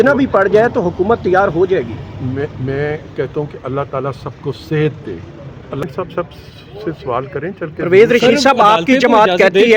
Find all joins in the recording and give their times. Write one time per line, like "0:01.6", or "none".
0:05.8